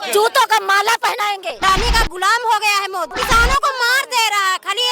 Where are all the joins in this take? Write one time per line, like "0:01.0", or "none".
0:01.6
0:03.1